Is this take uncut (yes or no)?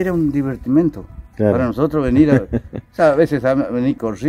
yes